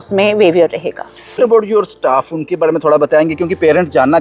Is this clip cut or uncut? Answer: cut